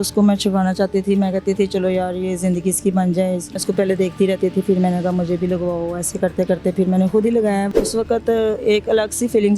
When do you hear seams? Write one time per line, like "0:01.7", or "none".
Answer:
0:03.6
0:07.7